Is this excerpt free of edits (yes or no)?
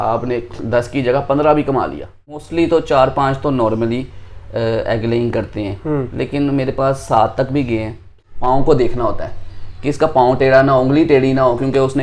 no